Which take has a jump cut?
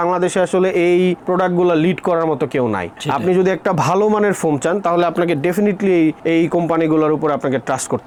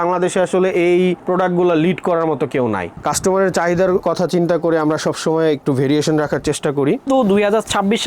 second; 2 cuts; at 2.9 s, 7.0 s

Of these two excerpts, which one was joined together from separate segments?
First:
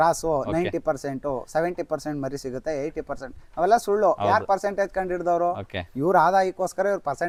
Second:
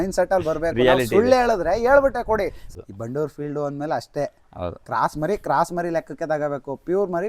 second; 1 cut; at 2.6 s

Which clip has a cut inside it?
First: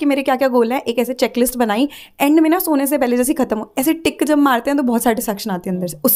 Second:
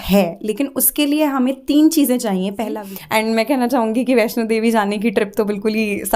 second; 1 cut; at 2.8 s

